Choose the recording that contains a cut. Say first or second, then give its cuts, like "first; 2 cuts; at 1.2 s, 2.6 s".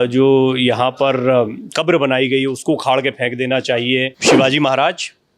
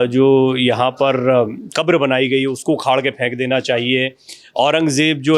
first; 1 cut; at 4.2 s